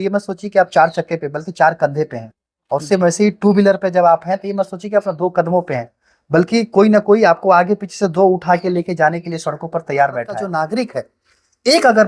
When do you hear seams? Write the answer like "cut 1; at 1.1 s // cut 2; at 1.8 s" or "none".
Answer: cut 1; at 10.6 s